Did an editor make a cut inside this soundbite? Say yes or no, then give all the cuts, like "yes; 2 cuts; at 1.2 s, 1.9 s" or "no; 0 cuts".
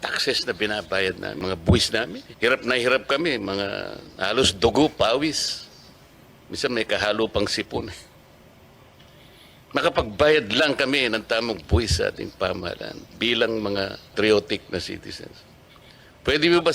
yes; 3 cuts; at 1.4 s, 2.2 s, 14.1 s